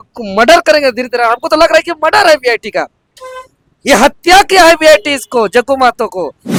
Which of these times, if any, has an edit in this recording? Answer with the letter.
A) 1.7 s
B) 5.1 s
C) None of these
C